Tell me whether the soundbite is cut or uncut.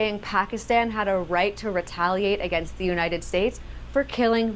uncut